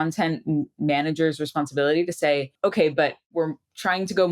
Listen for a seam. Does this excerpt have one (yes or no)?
yes